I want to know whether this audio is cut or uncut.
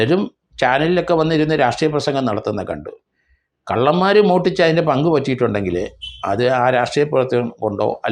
uncut